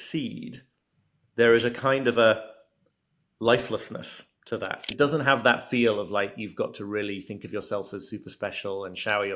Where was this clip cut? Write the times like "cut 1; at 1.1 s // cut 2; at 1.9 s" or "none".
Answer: cut 1; at 4.8 s